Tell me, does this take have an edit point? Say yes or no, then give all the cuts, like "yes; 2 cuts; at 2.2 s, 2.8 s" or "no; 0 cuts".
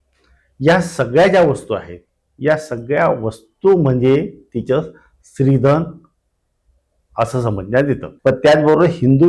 yes; 1 cut; at 8.1 s